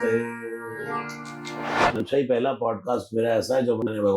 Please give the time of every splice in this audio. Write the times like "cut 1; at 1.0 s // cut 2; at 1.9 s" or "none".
cut 1; at 1.9 s